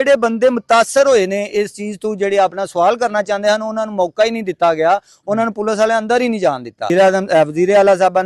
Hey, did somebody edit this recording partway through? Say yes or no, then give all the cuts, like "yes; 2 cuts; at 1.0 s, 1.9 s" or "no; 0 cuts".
yes; 1 cut; at 6.9 s